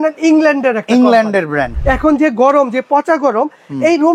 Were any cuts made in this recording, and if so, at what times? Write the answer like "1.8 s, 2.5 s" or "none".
1.7 s